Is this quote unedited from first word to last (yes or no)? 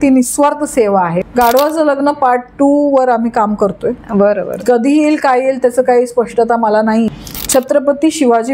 no